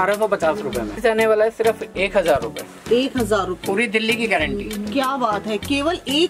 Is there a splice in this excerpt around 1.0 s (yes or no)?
yes